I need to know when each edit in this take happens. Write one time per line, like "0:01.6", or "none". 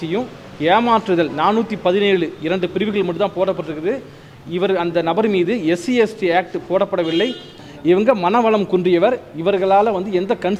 0:07.6